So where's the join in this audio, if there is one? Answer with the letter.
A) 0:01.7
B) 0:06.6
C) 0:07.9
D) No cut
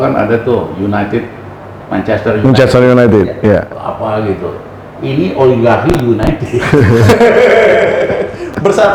D